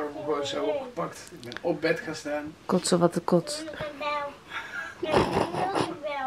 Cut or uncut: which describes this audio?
uncut